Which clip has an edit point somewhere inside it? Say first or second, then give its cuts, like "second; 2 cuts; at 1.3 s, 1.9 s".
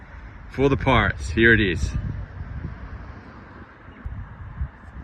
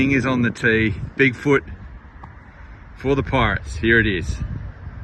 first; 1 cut; at 4.1 s